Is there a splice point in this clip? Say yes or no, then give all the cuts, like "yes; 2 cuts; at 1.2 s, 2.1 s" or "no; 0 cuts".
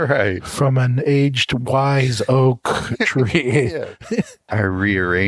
yes; 1 cut; at 4.4 s